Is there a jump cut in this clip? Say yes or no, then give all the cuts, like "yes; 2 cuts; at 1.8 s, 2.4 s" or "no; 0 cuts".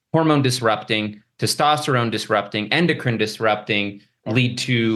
no; 0 cuts